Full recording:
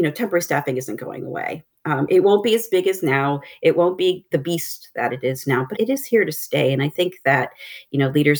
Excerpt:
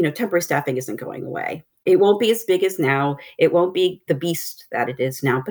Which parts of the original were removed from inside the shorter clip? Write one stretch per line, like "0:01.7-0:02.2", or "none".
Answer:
0:01.8-0:02.1